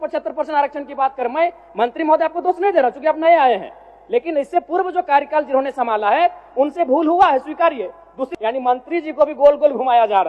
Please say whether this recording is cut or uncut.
cut